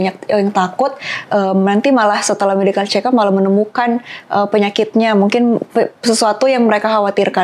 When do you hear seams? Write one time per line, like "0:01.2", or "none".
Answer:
none